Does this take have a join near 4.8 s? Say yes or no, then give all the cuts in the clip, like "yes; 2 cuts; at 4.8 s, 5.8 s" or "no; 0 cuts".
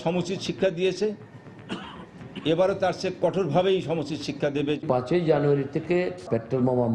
yes; 2 cuts; at 4.8 s, 6.2 s